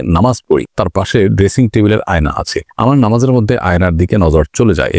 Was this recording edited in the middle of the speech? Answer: no; 0 cuts

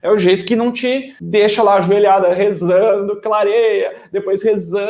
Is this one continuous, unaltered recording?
no; 1 cut; at 1.1 s

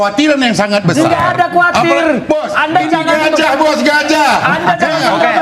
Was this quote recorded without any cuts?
yes; 0 cuts

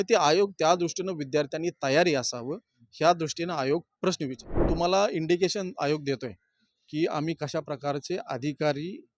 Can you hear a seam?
yes; 1 cut; at 4.7 s

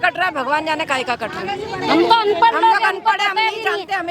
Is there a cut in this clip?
no; 0 cuts

